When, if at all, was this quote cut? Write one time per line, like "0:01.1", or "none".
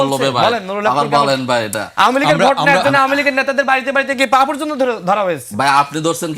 0:01.8